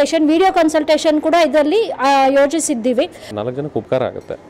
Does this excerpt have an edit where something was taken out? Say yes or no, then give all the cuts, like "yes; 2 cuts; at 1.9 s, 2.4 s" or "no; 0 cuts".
yes; 1 cut; at 3.2 s